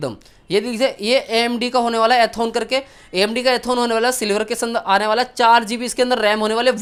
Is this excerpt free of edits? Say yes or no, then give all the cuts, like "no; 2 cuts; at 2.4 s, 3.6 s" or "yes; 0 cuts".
yes; 0 cuts